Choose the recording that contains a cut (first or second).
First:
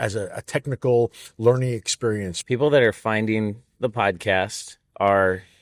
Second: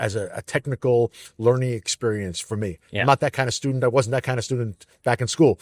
first